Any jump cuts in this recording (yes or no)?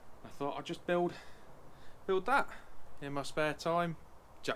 no